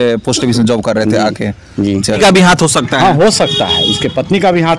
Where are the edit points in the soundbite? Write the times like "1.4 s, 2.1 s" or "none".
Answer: 2.2 s